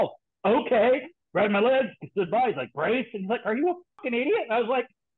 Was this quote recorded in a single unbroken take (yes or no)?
no